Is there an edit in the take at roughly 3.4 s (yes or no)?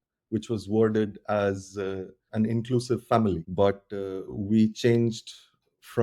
yes